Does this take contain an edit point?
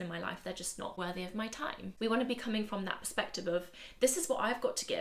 yes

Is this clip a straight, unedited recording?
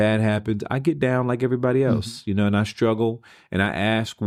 yes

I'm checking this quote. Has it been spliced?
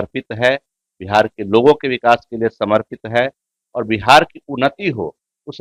no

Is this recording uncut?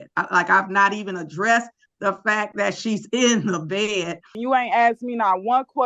no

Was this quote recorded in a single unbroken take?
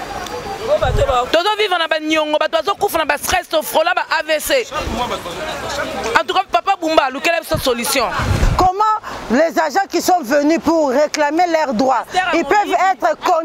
no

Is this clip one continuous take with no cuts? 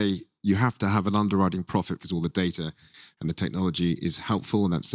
no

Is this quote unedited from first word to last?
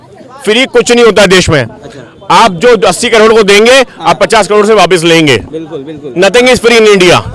yes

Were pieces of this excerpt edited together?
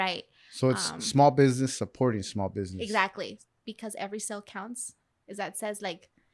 yes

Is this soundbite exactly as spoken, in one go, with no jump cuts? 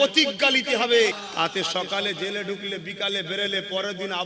no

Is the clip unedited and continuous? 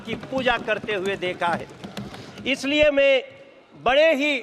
yes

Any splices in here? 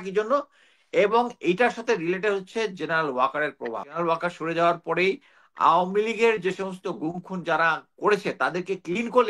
yes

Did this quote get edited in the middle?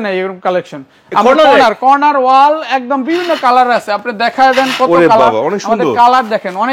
no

